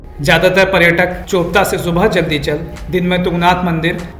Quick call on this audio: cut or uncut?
cut